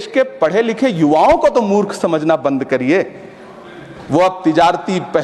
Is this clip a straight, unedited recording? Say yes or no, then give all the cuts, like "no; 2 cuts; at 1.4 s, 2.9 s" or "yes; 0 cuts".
yes; 0 cuts